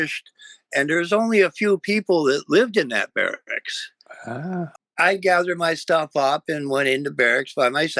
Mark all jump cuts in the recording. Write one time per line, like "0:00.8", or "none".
0:04.7